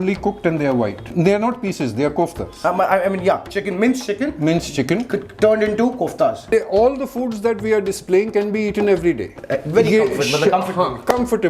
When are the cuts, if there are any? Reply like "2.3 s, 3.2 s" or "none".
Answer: 1.1 s, 2.6 s, 6.5 s